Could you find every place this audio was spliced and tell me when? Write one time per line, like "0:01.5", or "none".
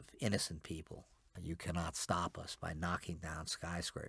0:01.3